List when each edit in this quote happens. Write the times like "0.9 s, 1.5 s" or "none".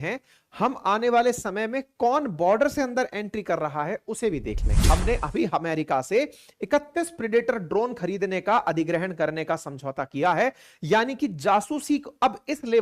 4.7 s